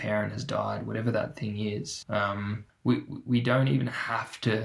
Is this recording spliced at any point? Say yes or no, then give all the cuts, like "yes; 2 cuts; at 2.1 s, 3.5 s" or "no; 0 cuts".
yes; 1 cut; at 2.1 s